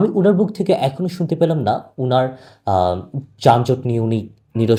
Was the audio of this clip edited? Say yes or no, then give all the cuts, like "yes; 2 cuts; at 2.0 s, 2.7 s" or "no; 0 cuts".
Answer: no; 0 cuts